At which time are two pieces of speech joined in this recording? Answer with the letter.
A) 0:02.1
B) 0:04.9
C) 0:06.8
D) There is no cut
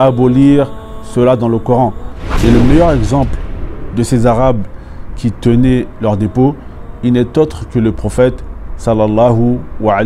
A